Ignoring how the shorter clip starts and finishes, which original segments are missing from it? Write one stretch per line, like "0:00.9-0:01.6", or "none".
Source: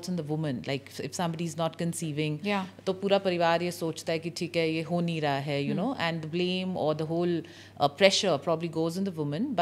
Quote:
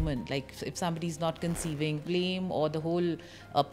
0:02.4-0:06.3